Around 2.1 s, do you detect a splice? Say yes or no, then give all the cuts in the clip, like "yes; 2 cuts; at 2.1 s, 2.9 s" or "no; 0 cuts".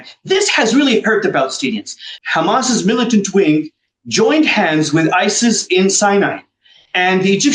yes; 1 cut; at 2.1 s